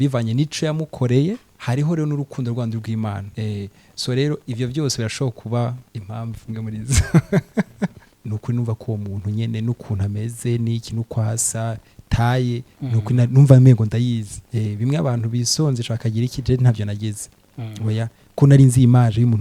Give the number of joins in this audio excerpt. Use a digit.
5